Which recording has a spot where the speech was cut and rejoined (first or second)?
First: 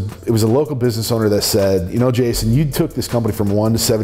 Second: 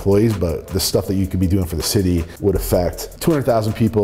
second